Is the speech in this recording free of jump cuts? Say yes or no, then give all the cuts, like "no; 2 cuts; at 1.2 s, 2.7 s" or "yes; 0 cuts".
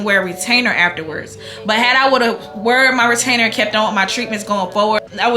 yes; 0 cuts